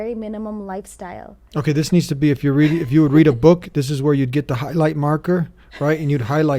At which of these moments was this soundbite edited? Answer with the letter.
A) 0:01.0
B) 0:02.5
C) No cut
C